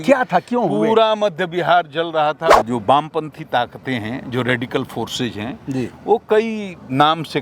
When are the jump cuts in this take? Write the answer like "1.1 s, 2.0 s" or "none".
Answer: 2.6 s

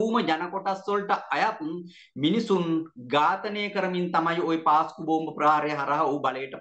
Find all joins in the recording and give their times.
none

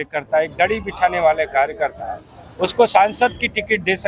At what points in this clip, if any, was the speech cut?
none

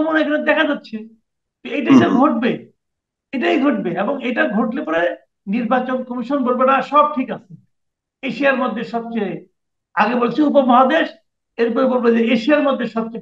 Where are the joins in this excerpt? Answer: none

